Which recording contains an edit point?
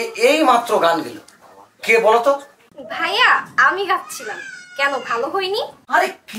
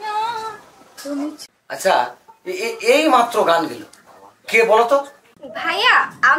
second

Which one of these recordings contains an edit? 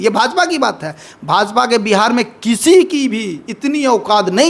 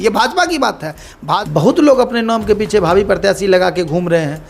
second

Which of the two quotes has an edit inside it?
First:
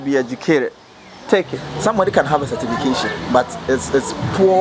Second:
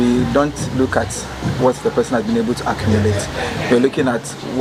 first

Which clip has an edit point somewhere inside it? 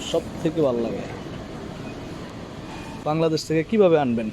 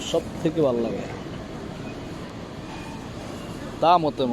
first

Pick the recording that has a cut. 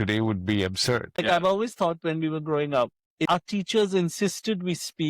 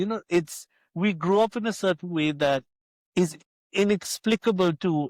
first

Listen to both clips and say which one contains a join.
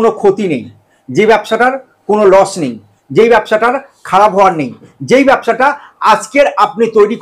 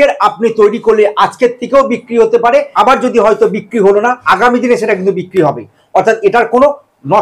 second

